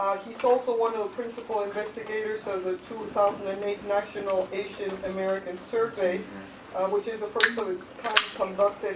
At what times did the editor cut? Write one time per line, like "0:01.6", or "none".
0:03.6